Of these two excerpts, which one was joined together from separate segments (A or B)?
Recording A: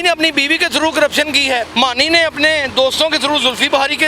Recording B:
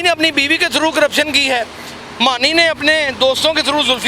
A